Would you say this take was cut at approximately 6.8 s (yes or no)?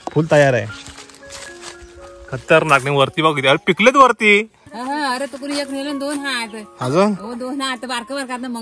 no